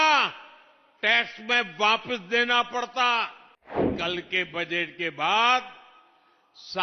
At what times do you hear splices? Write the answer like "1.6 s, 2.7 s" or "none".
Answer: 3.8 s